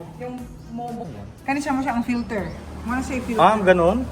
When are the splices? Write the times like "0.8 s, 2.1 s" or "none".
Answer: 1.0 s

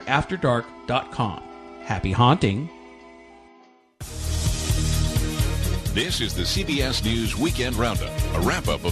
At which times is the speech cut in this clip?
4.4 s

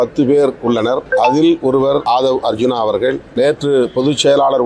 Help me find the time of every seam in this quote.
1.0 s, 2.0 s, 3.2 s

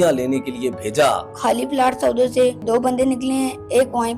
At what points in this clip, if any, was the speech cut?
1.3 s, 2.7 s

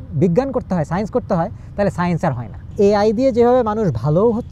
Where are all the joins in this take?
2.7 s

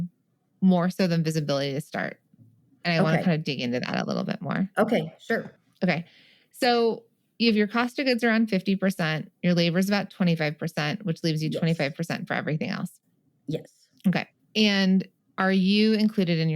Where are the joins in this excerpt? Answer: 5.6 s, 14.4 s, 15.2 s

